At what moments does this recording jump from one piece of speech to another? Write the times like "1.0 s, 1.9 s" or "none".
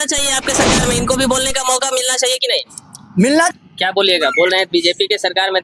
3.5 s